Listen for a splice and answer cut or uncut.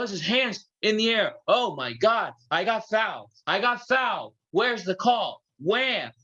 uncut